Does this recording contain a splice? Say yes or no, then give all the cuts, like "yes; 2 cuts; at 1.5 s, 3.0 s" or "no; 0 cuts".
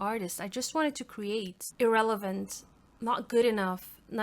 yes; 1 cut; at 1.6 s